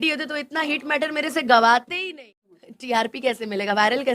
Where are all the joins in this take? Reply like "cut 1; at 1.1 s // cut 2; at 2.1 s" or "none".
cut 1; at 2.1 s